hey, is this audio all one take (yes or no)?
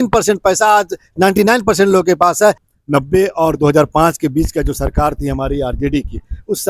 no